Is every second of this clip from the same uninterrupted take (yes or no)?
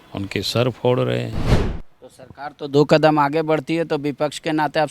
no